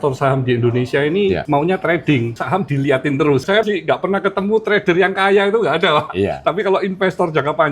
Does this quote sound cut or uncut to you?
cut